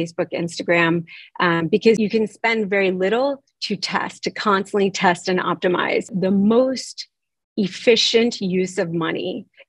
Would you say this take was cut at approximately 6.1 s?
yes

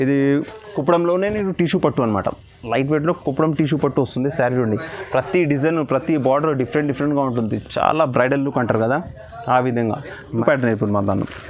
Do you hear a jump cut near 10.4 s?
yes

